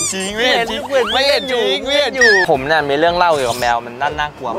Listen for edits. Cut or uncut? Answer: cut